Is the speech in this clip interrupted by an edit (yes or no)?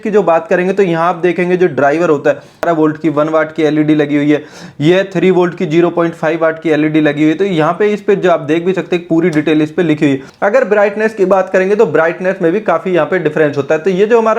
yes